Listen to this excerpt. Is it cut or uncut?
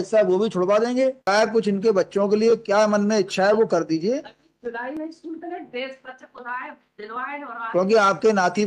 cut